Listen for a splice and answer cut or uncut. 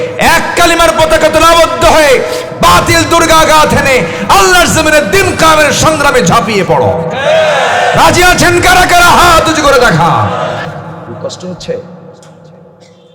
cut